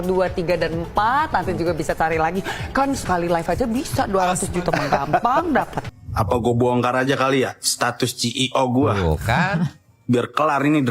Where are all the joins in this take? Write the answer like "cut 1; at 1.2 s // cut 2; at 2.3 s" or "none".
cut 1; at 5.8 s